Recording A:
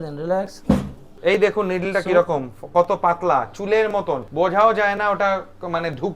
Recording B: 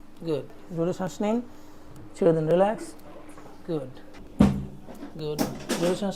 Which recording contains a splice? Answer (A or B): A